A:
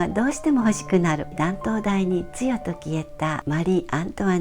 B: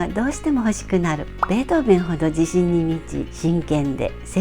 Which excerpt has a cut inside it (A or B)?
A